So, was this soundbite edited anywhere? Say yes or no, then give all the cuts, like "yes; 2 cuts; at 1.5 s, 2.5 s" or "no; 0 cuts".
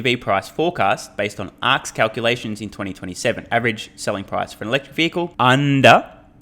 yes; 1 cut; at 5.3 s